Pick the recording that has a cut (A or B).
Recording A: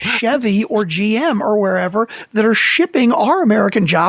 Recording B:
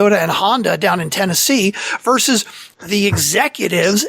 B